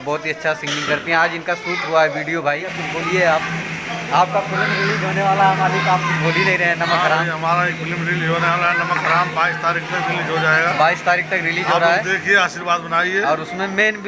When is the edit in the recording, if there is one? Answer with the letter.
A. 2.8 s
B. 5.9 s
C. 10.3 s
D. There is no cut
A